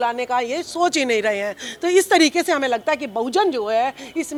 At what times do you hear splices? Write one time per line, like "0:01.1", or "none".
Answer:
none